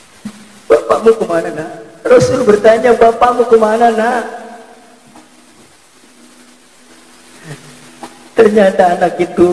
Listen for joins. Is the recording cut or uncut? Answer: cut